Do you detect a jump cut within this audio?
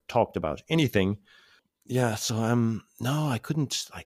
yes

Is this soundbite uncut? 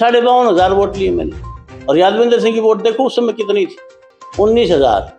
yes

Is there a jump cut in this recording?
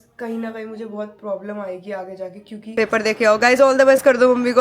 yes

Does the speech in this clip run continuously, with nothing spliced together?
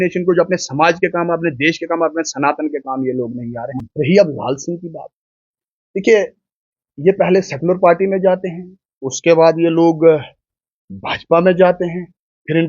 no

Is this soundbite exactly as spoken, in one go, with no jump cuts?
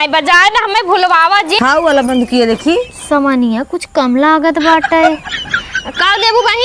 no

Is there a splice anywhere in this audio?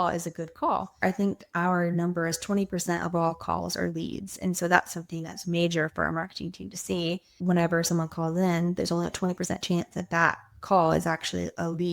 yes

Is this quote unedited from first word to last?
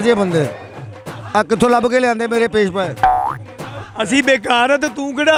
yes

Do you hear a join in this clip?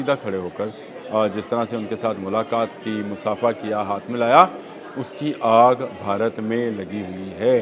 no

